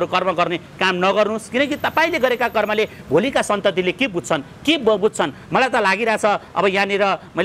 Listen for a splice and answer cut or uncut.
uncut